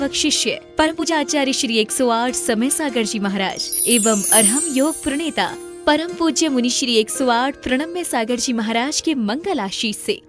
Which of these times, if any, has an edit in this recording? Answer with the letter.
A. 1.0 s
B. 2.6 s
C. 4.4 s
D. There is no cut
A